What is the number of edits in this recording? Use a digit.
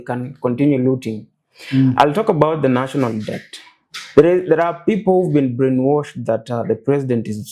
0